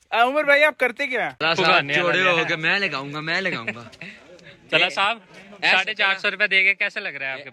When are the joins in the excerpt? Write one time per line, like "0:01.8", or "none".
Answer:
0:01.3

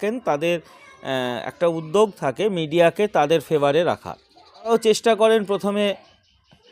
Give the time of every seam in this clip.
0:04.7

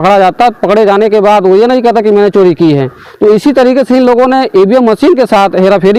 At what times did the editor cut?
none

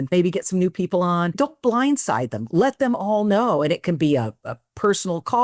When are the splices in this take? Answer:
0:01.3

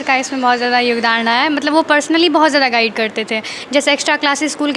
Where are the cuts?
none

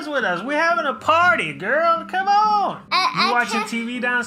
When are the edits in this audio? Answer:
none

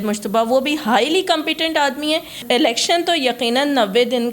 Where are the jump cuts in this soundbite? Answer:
0:02.4

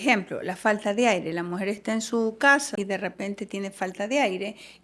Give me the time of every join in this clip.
0:02.7

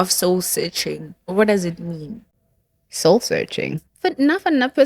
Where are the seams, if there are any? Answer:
0:03.9

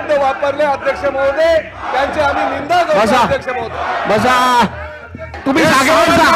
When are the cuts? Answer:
0:05.4

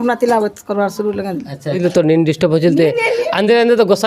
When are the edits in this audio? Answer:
0:01.8

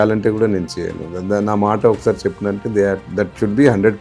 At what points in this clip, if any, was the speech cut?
none

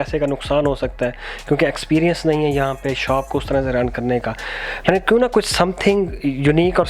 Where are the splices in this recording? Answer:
none

